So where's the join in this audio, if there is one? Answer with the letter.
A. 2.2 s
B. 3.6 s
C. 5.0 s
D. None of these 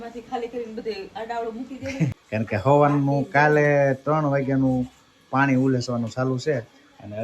A